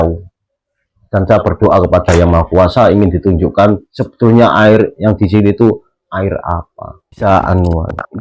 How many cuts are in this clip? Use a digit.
1